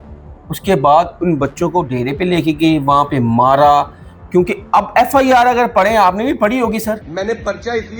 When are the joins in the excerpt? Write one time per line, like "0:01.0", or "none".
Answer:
0:07.1